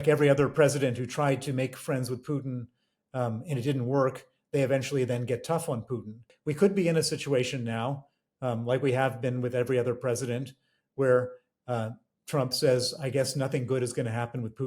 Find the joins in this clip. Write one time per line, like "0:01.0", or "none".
0:06.3